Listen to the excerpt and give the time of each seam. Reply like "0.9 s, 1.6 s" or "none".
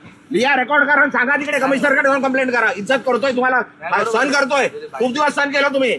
none